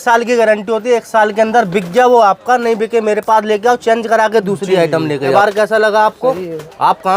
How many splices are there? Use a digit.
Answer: 1